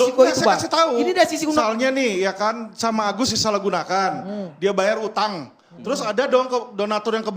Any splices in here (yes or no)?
yes